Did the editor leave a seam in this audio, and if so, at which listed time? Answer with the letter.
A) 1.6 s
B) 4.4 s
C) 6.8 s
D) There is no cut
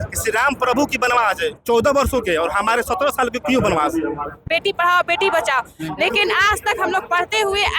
B